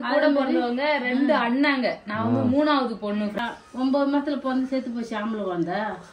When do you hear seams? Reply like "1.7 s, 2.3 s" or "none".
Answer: 3.4 s